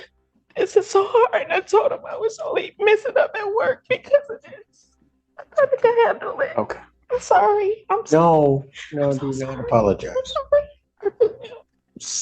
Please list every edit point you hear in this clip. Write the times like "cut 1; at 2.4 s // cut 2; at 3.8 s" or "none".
none